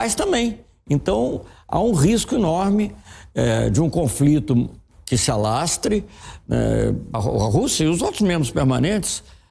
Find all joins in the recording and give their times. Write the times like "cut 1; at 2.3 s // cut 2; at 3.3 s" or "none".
cut 1; at 7.2 s

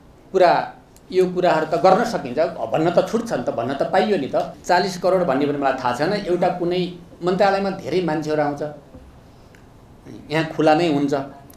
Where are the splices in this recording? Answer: cut 1; at 4.5 s

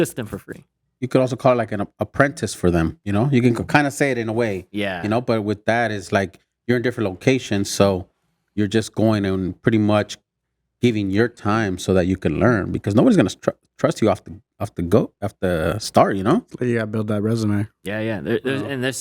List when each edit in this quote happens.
cut 1; at 3.0 s

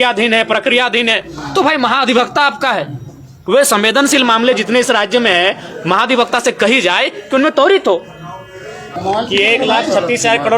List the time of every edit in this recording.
cut 1; at 9.0 s

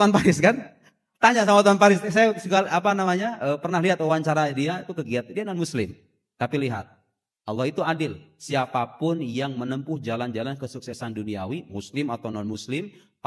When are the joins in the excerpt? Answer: none

